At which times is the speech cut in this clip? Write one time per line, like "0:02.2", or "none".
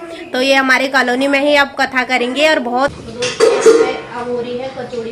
0:02.9

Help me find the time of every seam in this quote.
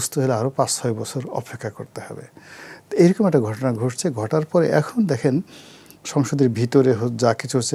none

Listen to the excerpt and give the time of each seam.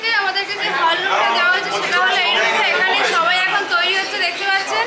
none

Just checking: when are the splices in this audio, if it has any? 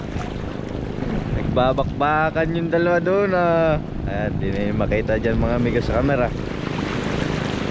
none

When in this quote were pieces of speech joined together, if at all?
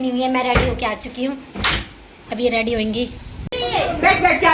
0:03.1

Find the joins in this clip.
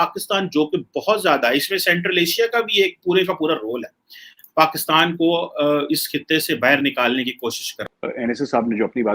0:07.8

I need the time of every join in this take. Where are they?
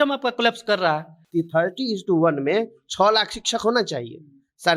0:01.2

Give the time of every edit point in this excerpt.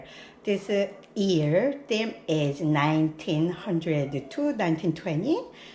none

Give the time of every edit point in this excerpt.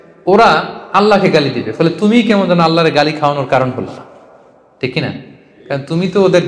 none

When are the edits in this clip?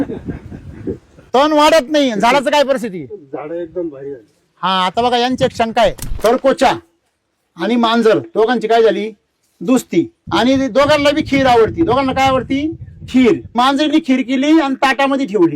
0:06.1
0:10.2
0:13.5

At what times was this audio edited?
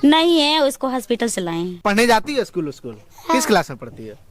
0:01.8

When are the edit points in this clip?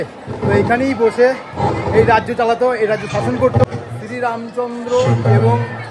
0:03.6

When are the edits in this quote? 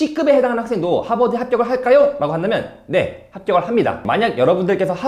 0:04.0

